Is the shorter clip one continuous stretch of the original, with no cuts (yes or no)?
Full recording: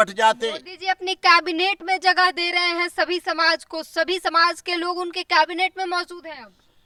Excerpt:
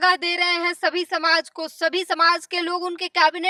yes